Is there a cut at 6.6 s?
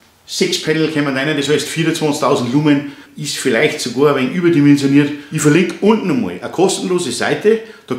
no; 2 cuts; at 3.0 s, 5.2 s

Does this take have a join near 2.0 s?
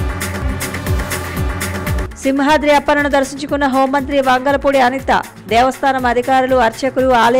yes; 1 cut; at 2.0 s

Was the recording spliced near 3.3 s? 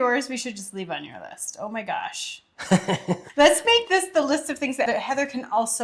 yes; 2 cuts; at 3.3 s, 4.9 s

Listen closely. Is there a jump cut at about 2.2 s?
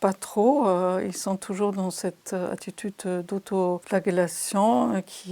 no; 1 cut; at 3.8 s

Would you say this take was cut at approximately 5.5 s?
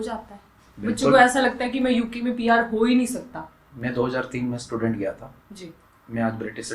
no; 0 cuts

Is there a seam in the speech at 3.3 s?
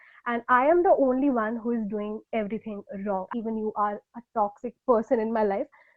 yes; 1 cut; at 3.3 s

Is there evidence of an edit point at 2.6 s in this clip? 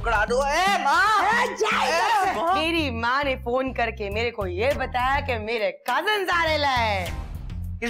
yes; 1 cut; at 2.6 s

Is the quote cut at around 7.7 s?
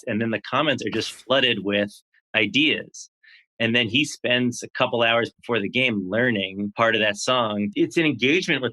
yes; 2 cuts; at 6.7 s, 7.7 s

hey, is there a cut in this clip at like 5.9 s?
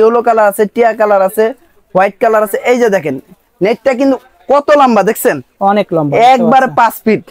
no; 0 cuts

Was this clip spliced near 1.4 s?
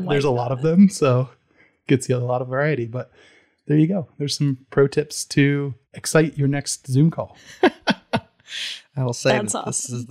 no; 0 cuts

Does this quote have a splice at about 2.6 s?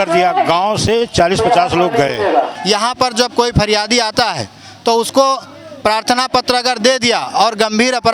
yes; 1 cut; at 2.6 s

